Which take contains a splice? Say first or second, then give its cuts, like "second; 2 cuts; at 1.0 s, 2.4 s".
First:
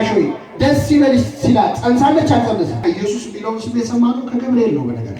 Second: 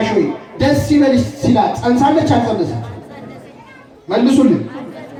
first; 1 cut; at 2.8 s